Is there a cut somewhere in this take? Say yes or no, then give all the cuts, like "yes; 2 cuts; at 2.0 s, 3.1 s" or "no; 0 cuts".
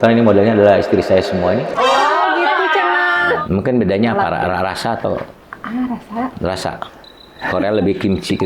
yes; 1 cut; at 3.4 s